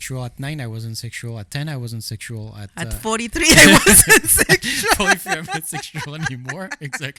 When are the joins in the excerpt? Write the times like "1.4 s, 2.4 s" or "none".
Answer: none